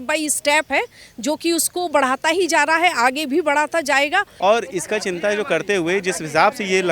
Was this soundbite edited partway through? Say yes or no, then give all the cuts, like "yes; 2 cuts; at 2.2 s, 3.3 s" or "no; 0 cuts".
yes; 1 cut; at 4.3 s